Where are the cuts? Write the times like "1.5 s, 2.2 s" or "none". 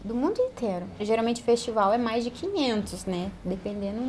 1.0 s